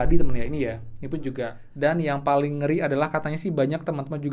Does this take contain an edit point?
yes; 1 cut; at 1.6 s

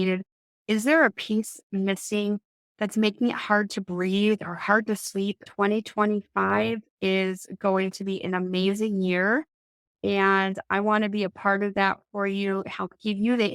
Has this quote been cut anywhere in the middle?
yes; 1 cut; at 5.4 s

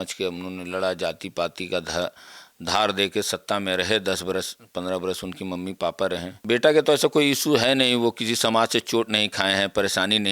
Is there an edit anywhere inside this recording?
yes; 1 cut; at 6.3 s

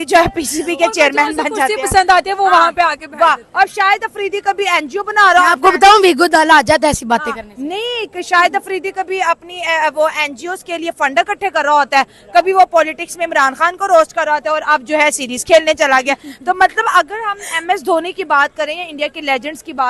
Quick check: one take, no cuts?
yes; 0 cuts

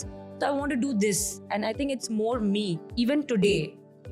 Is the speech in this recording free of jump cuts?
no; 1 cut; at 2.8 s

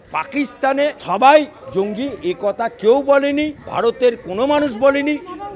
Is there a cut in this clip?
yes; 2 cuts; at 1.0 s, 3.6 s

